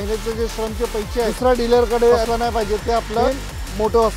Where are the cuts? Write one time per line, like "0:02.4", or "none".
0:01.3
0:02.3
0:03.2